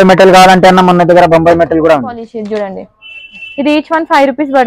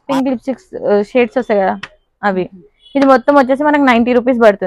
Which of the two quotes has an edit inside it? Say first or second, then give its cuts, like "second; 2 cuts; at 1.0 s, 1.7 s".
first; 1 cut; at 2.2 s